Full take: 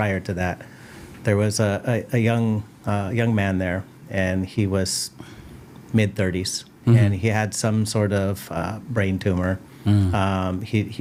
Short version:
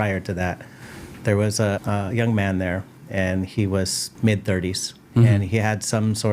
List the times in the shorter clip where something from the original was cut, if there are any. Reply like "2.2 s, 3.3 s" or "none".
1.8 s, 4.0 s